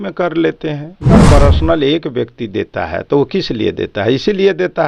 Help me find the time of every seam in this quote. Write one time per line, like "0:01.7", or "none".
0:01.2